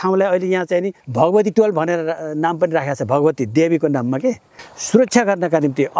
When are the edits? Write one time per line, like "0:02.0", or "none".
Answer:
0:01.0
0:04.5